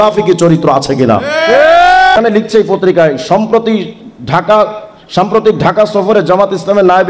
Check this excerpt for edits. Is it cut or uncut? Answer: cut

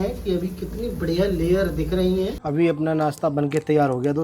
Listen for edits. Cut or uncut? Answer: cut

